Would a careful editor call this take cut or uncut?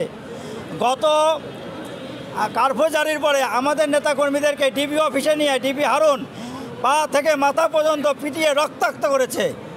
uncut